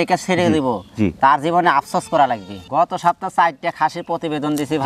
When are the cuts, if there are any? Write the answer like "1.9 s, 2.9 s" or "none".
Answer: 2.6 s